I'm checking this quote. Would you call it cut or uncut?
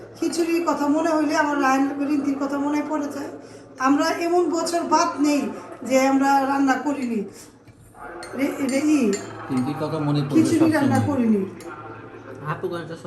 uncut